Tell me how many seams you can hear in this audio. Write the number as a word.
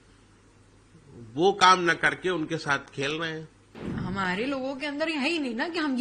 one